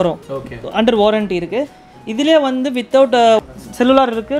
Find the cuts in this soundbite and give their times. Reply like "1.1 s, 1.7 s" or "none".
3.4 s